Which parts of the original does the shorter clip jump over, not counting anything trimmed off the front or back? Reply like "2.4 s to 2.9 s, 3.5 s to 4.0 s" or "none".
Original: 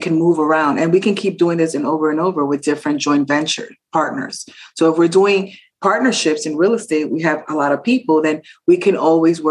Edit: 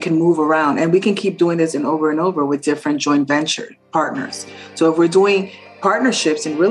none